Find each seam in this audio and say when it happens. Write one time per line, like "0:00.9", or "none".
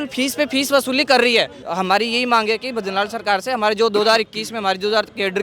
0:01.6